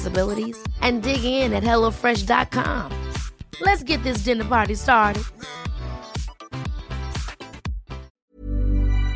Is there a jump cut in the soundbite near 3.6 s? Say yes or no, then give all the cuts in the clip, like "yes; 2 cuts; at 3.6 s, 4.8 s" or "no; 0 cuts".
no; 1 cut; at 8.1 s